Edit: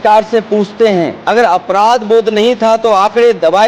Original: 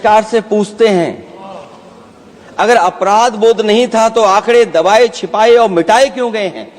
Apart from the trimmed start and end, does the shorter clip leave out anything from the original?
yes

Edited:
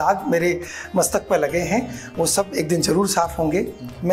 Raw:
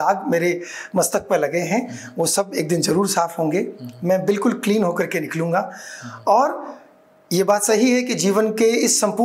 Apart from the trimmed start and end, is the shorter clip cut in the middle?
no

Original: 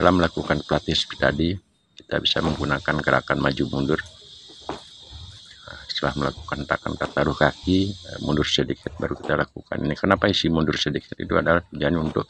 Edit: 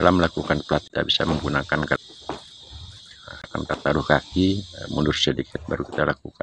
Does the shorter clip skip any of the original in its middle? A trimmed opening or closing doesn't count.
yes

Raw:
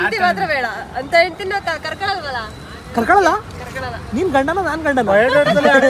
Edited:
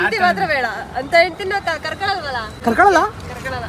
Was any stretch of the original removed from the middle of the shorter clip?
yes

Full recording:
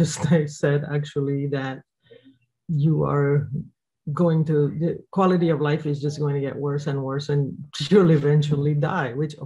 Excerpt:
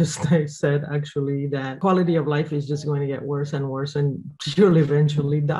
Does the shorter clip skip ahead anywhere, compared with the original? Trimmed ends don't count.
yes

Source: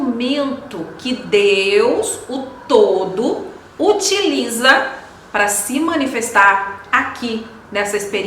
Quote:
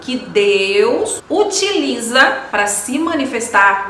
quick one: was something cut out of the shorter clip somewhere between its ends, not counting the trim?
yes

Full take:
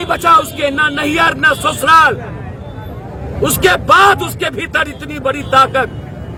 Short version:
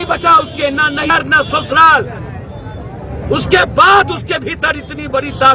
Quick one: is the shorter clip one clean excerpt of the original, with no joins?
no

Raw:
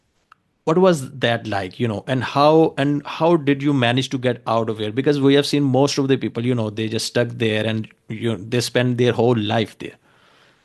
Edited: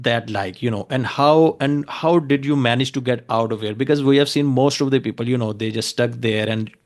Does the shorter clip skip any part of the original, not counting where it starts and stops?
no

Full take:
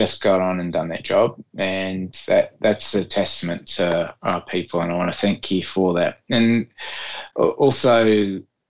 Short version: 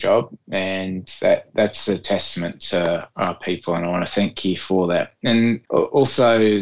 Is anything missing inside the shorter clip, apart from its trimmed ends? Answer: yes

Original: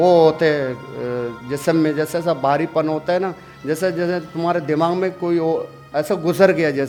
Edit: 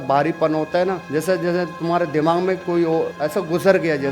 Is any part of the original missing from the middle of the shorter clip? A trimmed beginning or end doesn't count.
yes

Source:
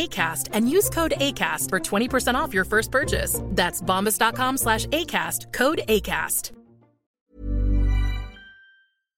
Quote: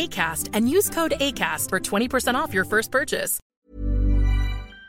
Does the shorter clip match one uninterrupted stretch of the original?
no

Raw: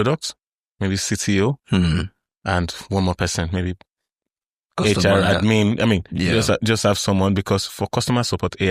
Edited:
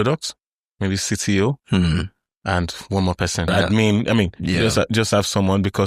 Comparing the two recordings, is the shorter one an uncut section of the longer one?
no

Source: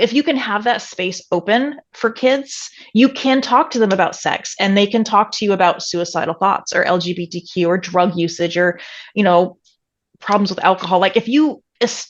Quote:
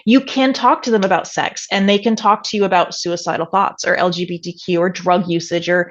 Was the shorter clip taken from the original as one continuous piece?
yes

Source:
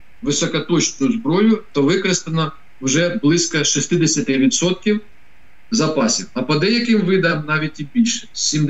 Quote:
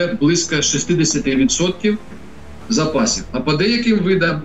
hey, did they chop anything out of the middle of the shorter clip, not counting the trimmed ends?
no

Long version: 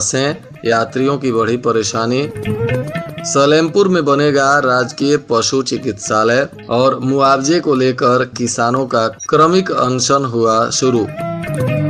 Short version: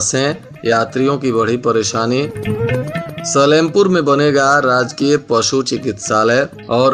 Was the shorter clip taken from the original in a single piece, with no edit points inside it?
yes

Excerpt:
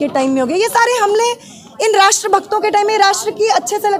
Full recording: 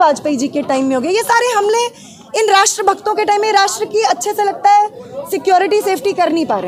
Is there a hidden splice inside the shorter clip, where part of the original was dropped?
no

